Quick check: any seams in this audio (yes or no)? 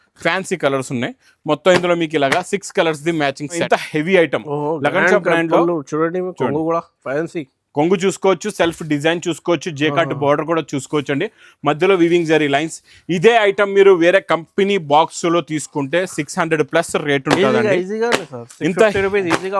yes